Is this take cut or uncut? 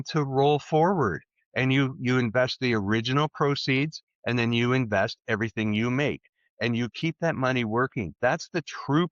cut